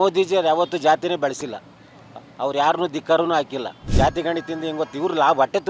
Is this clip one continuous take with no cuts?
no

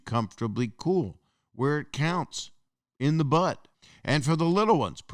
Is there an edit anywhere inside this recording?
yes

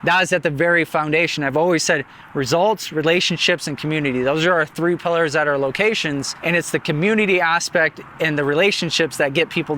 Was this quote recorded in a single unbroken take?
no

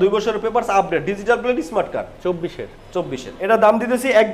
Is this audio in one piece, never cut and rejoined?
no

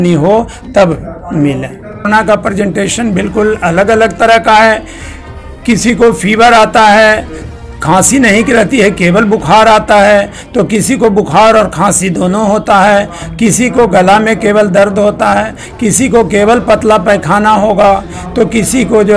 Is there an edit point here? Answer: yes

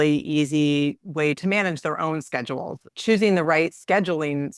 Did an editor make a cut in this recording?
yes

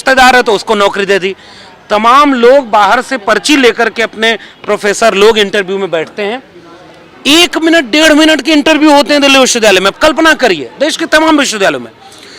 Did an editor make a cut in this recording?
no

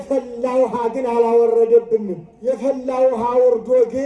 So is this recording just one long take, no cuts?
no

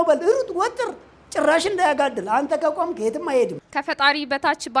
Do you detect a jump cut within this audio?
yes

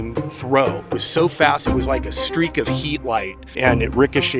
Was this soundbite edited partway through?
yes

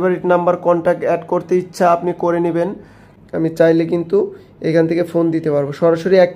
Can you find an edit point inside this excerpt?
yes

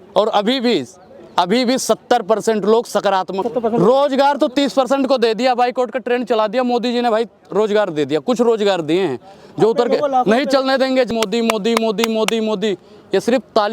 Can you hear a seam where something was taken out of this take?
yes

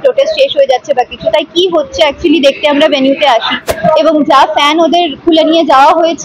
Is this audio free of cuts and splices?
no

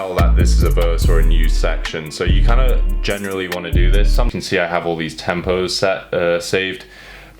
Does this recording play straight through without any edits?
no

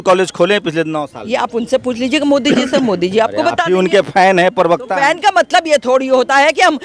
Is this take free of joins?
yes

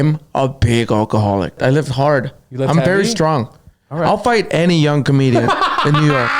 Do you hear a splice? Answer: yes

